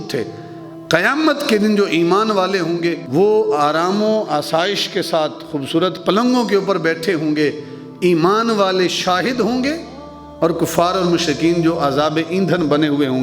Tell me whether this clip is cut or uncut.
cut